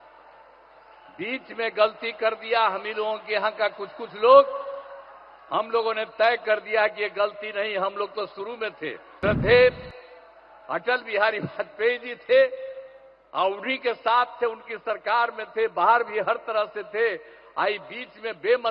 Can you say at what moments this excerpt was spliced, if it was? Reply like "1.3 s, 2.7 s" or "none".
9.1 s